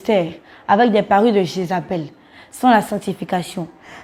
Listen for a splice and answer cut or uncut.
uncut